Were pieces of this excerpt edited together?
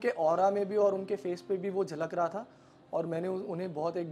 no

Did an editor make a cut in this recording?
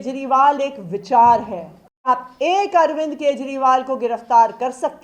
yes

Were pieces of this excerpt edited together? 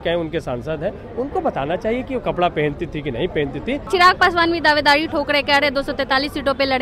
yes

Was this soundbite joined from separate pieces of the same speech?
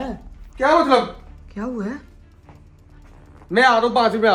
no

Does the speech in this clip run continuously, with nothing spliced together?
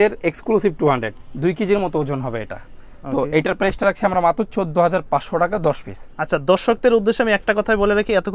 yes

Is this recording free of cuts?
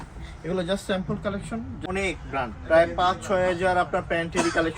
no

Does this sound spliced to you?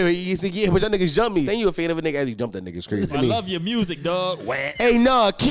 yes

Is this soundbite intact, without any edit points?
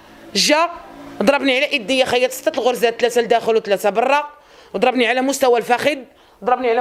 yes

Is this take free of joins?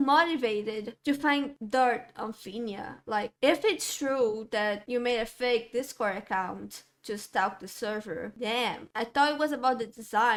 yes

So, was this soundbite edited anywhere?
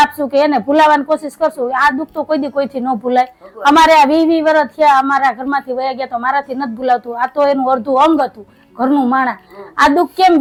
no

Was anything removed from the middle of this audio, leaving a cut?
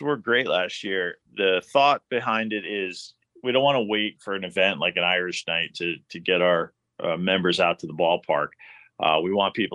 yes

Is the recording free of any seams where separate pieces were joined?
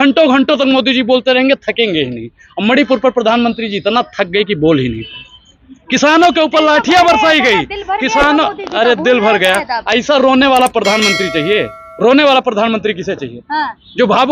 yes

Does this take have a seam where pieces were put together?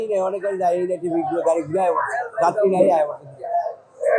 no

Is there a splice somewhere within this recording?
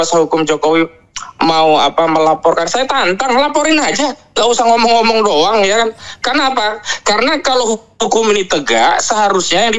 no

